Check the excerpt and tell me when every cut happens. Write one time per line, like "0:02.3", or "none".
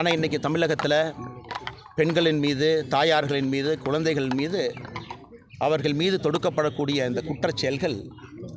none